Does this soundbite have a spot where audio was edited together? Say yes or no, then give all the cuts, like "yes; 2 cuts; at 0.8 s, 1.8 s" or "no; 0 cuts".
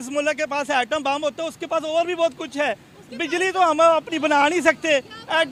no; 0 cuts